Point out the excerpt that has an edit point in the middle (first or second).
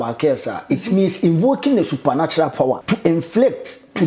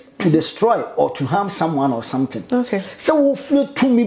first